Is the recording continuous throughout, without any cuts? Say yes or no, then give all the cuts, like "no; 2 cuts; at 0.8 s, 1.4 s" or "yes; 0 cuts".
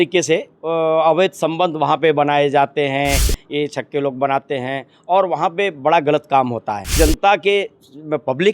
no; 1 cut; at 6.9 s